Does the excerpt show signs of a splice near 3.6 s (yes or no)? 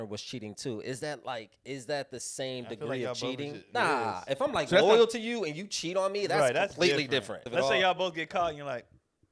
yes